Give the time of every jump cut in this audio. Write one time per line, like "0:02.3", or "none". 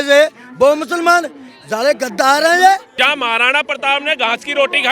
0:02.9